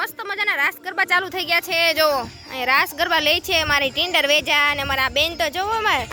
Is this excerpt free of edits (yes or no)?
yes